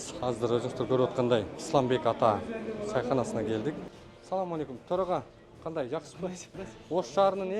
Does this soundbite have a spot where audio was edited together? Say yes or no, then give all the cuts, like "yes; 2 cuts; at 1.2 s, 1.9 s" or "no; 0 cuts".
yes; 3 cuts; at 1.6 s, 3.9 s, 6.4 s